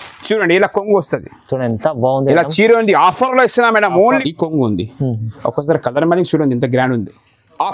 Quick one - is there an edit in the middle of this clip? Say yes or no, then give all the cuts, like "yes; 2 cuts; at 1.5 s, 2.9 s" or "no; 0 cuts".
yes; 1 cut; at 4.2 s